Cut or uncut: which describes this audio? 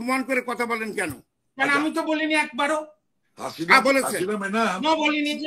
uncut